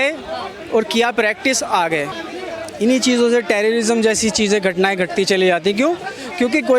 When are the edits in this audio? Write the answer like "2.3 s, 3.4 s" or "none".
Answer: 2.2 s